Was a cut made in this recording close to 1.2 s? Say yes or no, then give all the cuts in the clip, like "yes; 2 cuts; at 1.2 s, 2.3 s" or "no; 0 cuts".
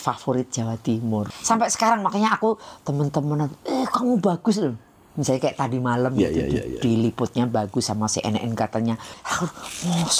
yes; 2 cuts; at 1.2 s, 9.2 s